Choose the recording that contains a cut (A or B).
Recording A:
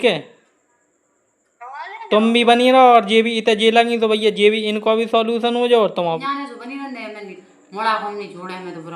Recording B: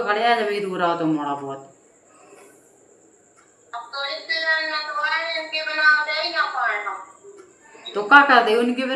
A